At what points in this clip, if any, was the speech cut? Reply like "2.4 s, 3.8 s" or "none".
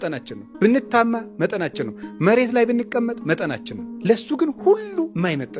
none